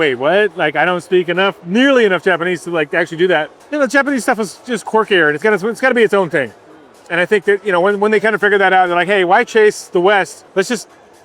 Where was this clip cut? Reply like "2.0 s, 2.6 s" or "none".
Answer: 3.6 s, 10.4 s